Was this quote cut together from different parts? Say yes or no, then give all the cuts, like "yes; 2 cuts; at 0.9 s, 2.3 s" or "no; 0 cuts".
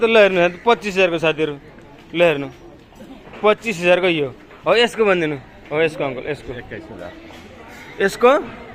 no; 0 cuts